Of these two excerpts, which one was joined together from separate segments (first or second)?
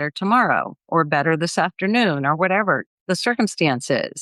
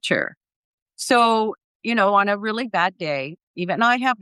first